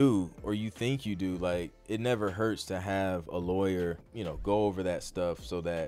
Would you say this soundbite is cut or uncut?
cut